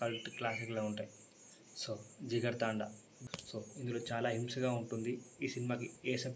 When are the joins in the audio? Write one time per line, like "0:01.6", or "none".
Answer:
0:03.1

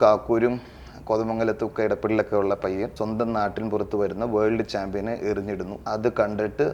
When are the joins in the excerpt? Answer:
0:02.9
0:05.7

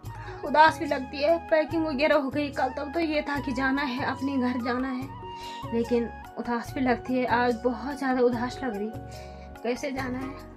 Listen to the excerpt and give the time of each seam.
none

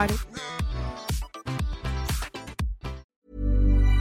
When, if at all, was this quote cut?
0:03.0

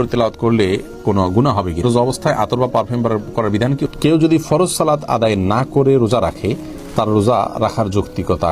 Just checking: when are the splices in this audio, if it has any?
0:01.8
0:03.9

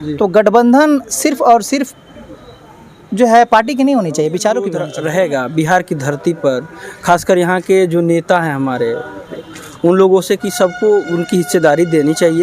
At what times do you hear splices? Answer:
0:04.9

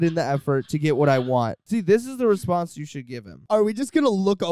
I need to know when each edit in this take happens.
0:01.6
0:03.4

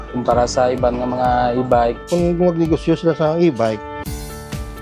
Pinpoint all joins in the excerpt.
0:02.0
0:03.8

